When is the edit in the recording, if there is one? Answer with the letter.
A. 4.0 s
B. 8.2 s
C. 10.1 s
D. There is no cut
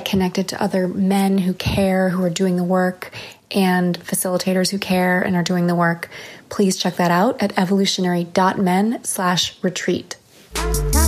C